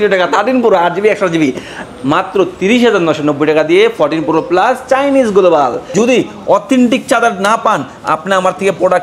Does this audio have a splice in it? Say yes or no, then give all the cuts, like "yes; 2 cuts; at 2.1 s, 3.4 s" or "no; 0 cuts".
yes; 2 cuts; at 1.8 s, 5.9 s